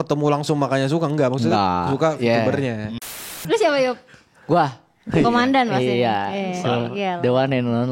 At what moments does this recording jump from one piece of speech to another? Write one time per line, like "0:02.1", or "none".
0:03.2